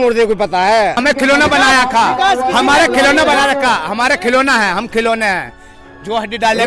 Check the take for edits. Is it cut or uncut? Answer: cut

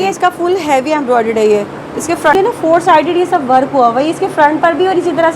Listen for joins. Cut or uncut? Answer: cut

